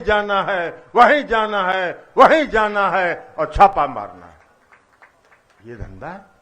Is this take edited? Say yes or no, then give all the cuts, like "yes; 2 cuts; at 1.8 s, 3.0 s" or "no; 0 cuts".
no; 0 cuts